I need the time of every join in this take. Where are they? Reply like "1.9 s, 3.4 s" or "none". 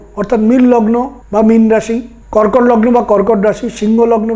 1.2 s, 2.2 s